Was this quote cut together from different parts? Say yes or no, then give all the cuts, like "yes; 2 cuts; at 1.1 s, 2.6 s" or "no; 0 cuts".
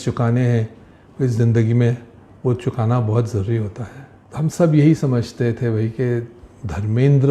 yes; 1 cut; at 4.2 s